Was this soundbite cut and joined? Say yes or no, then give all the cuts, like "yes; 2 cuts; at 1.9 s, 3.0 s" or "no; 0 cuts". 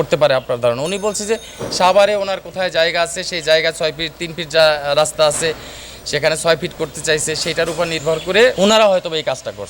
yes; 1 cut; at 8.5 s